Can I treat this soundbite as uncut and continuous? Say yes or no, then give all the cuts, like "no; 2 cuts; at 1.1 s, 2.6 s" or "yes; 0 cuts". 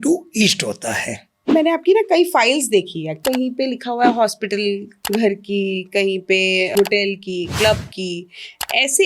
no; 4 cuts; at 1.5 s, 3.2 s, 4.9 s, 6.7 s